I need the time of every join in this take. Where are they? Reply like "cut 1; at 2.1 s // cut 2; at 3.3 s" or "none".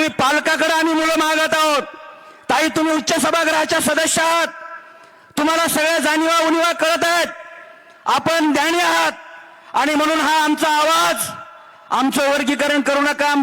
none